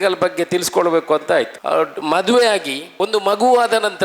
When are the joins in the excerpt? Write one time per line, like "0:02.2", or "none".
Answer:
0:01.6
0:02.8